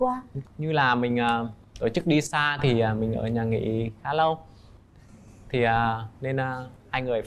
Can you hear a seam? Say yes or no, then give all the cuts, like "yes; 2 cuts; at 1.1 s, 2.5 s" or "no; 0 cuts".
no; 0 cuts